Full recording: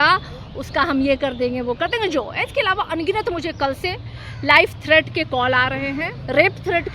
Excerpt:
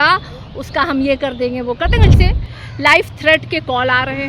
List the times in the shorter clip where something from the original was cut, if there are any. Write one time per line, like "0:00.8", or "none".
0:02.1